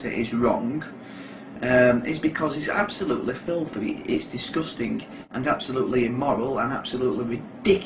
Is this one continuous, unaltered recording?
no; 1 cut; at 5.1 s

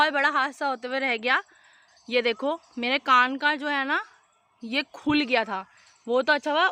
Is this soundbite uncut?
yes; 0 cuts

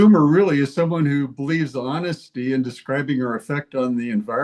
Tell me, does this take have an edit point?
no; 0 cuts

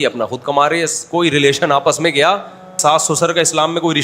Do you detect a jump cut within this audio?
yes; 1 cut; at 2.8 s

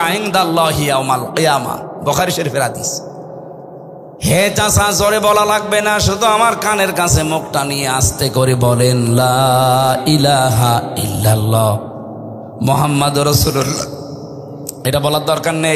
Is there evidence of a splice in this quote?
no; 0 cuts

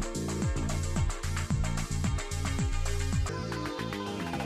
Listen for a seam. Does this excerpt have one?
no; 0 cuts

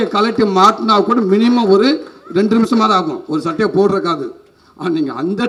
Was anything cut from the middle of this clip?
no; 0 cuts

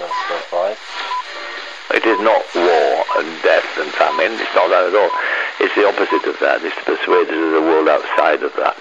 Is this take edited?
yes; 1 cut; at 1.4 s

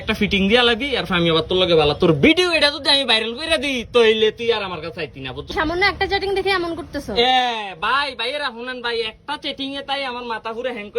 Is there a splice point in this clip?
yes; 1 cut; at 5.5 s

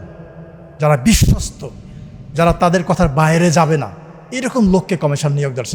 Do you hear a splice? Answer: no; 0 cuts

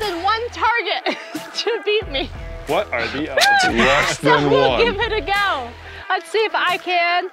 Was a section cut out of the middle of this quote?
no; 0 cuts

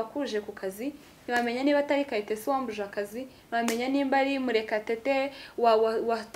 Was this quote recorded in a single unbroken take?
yes; 0 cuts

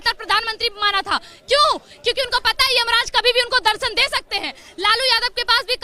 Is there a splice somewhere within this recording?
no; 0 cuts

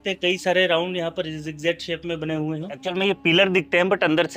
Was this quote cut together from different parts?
yes; 1 cut; at 2.8 s

